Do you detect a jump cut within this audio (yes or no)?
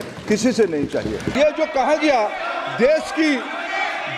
yes